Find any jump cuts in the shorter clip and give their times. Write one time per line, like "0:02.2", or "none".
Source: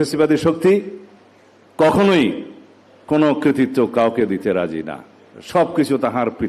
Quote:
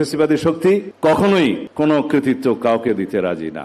0:00.9
0:01.7